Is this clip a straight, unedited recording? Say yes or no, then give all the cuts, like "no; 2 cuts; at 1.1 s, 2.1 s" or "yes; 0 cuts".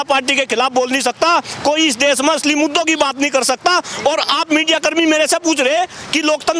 yes; 0 cuts